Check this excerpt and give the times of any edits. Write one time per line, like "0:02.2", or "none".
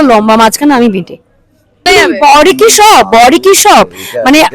0:01.8